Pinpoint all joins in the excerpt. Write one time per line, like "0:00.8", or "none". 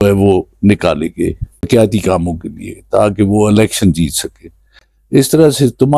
0:01.7